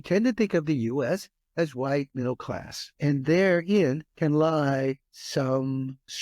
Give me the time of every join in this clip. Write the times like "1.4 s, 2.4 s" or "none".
2.9 s, 4.1 s, 5.1 s